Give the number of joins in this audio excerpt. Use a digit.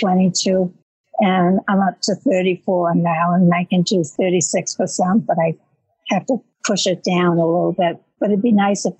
1